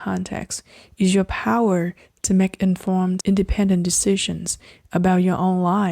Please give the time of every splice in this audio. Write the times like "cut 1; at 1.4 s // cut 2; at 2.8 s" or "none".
cut 1; at 3.2 s